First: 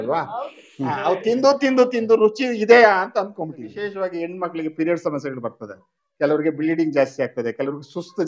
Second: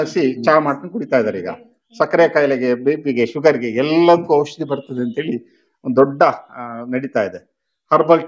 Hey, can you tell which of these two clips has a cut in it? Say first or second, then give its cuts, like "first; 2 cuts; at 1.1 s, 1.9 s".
first; 1 cut; at 3.7 s